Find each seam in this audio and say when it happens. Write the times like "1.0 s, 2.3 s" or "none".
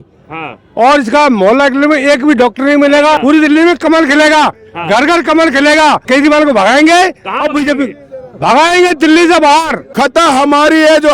3.2 s, 6.0 s, 9.8 s